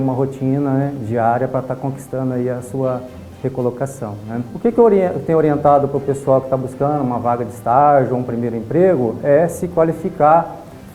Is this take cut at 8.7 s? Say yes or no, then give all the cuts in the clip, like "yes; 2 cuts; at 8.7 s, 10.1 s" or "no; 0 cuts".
no; 1 cut; at 4.5 s